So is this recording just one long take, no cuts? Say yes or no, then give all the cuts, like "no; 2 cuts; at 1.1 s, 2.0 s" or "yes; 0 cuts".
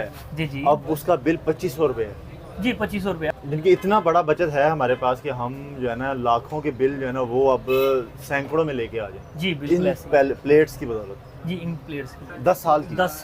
no; 2 cuts; at 3.3 s, 12.2 s